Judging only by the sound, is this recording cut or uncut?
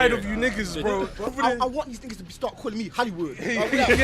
cut